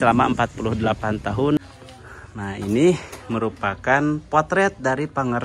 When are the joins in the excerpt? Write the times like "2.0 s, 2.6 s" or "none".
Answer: 1.6 s